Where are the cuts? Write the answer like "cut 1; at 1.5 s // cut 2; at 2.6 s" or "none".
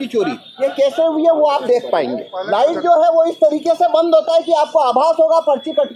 cut 1; at 2.3 s